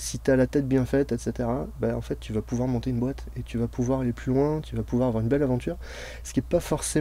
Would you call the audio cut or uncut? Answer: uncut